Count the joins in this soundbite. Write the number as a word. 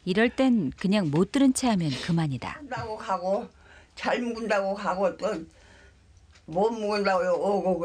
one